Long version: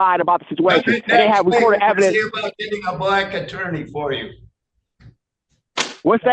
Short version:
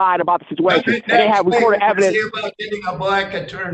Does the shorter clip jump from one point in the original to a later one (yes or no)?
no